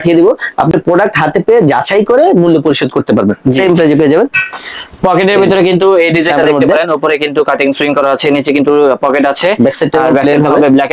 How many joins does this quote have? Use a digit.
0